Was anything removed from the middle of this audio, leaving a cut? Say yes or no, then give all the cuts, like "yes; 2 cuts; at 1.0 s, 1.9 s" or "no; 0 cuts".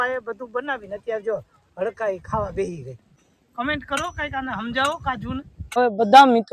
yes; 1 cut; at 3.3 s